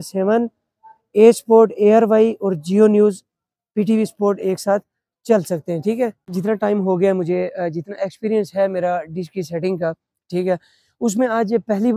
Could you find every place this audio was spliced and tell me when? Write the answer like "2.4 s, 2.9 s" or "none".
6.2 s